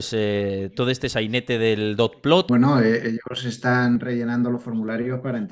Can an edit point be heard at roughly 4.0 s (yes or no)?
yes